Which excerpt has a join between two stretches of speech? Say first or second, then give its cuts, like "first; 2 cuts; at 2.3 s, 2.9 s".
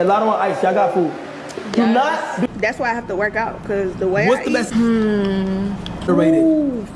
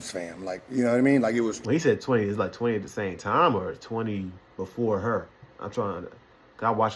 first; 1 cut; at 3.3 s